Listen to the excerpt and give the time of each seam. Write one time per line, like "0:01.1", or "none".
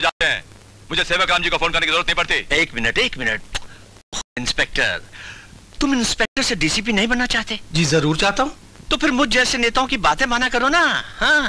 none